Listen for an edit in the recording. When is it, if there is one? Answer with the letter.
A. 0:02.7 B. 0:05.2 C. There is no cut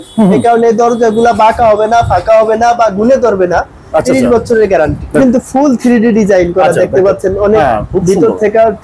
B